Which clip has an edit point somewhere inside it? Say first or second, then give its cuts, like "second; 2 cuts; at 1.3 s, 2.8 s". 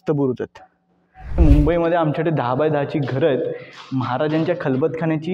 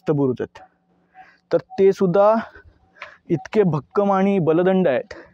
first; 1 cut; at 1.4 s